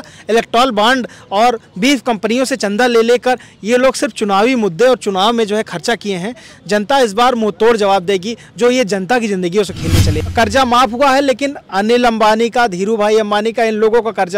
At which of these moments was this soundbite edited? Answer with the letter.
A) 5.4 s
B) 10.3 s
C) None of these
B